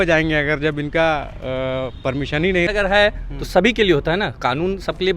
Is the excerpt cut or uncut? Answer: cut